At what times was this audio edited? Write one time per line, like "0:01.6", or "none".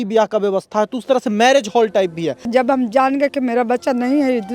0:02.5

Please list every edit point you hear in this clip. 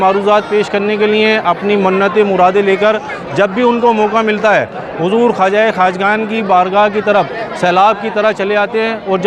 none

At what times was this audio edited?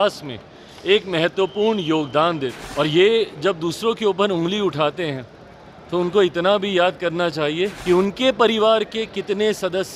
0:02.6
0:07.8

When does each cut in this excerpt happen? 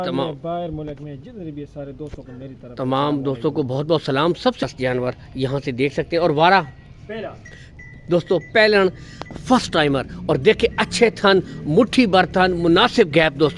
0:04.6

